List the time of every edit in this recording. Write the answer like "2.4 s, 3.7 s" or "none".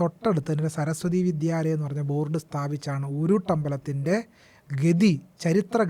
none